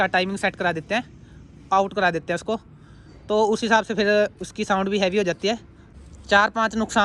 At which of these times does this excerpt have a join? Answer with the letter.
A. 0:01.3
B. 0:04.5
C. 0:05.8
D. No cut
C